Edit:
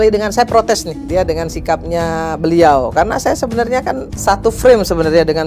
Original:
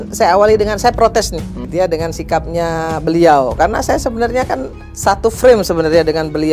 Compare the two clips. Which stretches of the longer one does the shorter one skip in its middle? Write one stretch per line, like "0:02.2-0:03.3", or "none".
0:01.4-0:01.6
0:04.7-0:04.9

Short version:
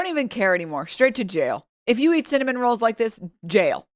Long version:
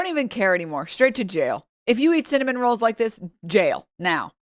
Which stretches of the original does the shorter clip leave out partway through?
none

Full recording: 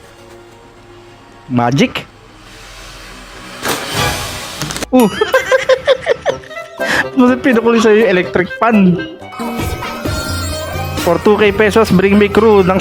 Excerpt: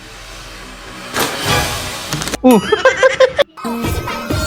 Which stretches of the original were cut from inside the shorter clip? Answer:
0:05.9-0:09.2

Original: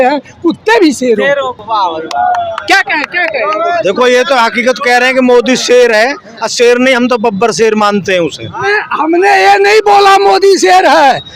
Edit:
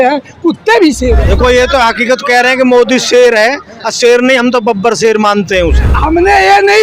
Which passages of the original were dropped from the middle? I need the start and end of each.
0:01.2-0:03.8
0:08.4-0:08.8

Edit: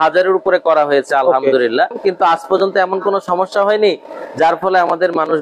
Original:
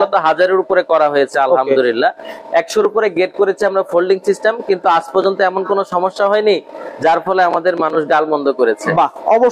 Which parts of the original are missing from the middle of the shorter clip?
0:02.2-0:04.6

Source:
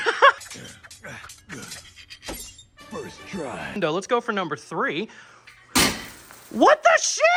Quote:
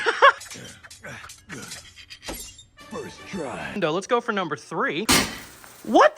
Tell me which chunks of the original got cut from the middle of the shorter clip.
0:05.0-0:05.7

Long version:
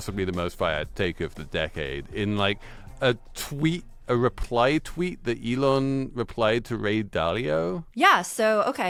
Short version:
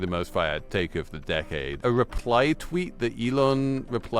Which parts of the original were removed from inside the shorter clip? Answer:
0:02.0-0:04.0

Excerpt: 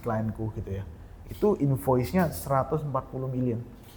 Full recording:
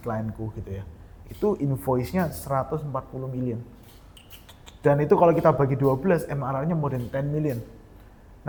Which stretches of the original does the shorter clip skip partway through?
none

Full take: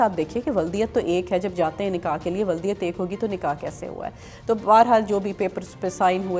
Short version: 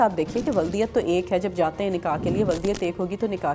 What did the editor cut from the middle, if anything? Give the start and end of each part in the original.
none

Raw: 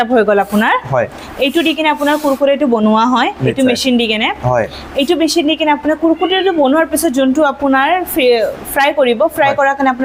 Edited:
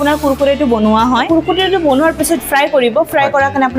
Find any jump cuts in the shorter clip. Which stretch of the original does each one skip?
0:03.3-0:06.0
0:07.1-0:08.6

